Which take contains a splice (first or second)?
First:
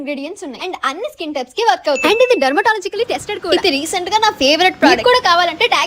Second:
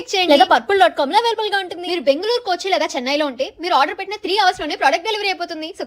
first